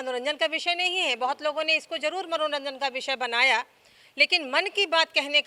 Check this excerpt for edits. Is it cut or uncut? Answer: uncut